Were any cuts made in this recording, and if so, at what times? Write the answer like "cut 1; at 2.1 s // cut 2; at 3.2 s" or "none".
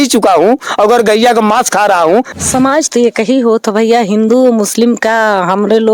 cut 1; at 2.3 s